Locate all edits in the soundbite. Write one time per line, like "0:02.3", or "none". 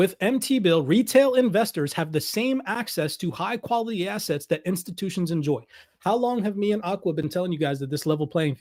none